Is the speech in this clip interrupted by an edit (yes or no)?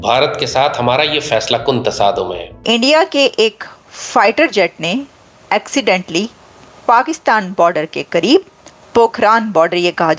yes